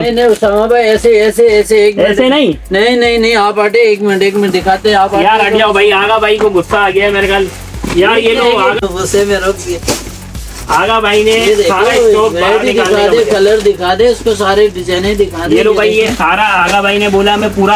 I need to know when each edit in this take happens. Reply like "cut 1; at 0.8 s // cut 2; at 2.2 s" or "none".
none